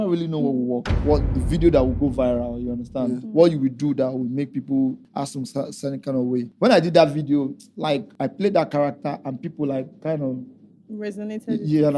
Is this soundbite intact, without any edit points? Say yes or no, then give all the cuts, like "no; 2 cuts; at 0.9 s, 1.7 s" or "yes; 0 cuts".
no; 4 cuts; at 0.9 s, 5.0 s, 6.5 s, 8.1 s